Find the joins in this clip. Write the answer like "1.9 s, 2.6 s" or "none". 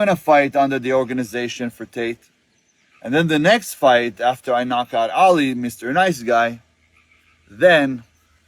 none